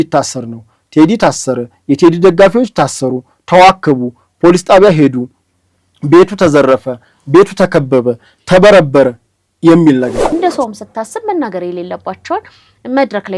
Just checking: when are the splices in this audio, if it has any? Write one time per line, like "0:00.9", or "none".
0:10.2

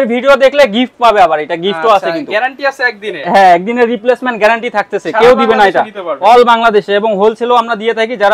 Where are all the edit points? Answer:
none

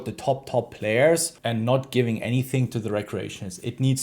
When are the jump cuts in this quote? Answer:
0:01.3

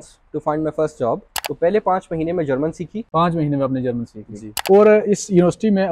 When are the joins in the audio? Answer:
0:01.3
0:03.0
0:04.6

